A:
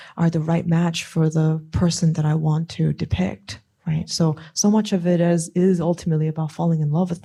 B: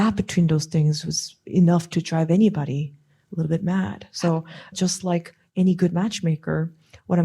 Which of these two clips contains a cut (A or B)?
B